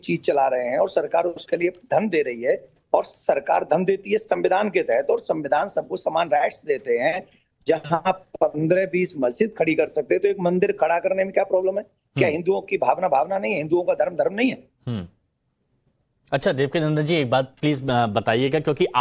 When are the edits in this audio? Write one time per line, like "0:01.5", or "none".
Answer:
0:13.6